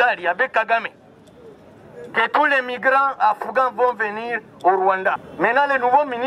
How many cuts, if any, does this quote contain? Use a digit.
1